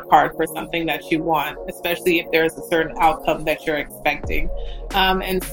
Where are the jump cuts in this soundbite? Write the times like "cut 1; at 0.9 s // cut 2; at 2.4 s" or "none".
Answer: none